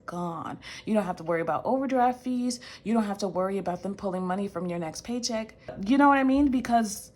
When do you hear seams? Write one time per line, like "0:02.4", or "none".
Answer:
0:05.8